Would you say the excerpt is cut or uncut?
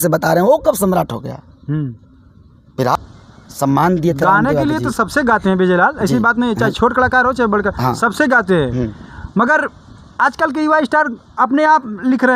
cut